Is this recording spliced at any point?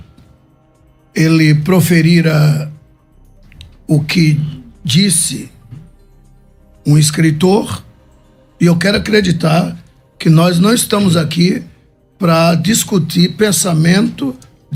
no; 0 cuts

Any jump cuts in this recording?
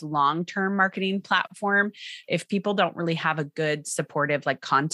yes; 1 cut; at 1.9 s

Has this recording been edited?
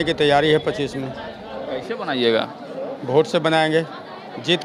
no; 0 cuts

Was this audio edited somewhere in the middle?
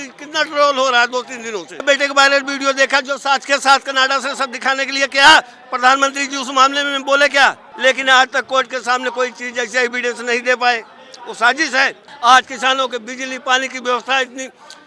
yes; 3 cuts; at 1.8 s, 7.7 s, 12.1 s

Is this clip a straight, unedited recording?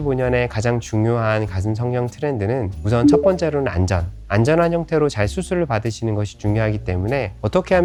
yes; 0 cuts

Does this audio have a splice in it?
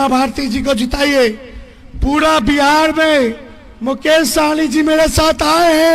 no; 0 cuts

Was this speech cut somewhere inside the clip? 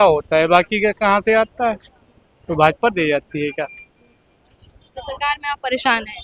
no; 0 cuts

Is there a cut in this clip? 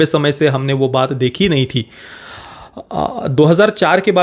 no; 0 cuts

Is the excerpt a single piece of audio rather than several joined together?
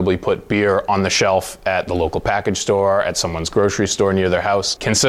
yes; 0 cuts

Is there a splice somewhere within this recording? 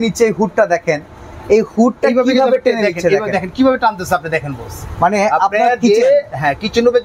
no; 0 cuts

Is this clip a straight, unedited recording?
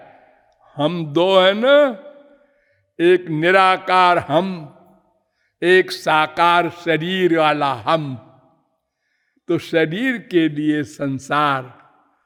yes; 0 cuts

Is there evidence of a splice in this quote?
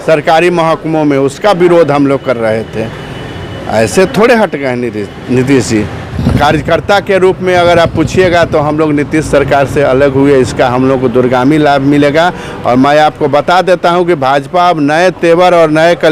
yes; 1 cut; at 6.1 s

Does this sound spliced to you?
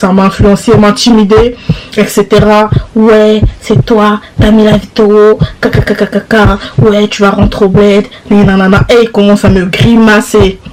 no; 0 cuts

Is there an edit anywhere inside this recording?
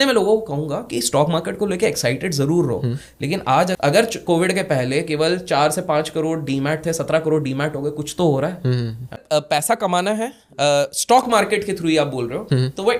yes; 2 cuts; at 3.8 s, 9.2 s

